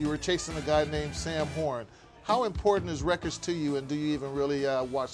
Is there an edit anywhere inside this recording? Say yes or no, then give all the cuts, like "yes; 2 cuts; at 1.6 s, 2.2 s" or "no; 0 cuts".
no; 0 cuts